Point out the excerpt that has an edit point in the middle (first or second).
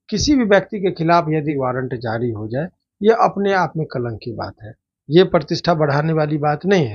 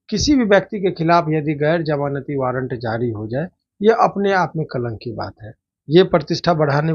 first